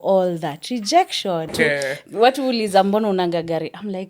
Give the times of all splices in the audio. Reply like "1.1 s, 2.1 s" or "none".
1.5 s